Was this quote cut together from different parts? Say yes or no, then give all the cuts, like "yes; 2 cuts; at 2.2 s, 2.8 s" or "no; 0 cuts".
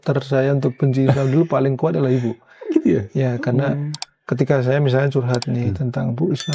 no; 0 cuts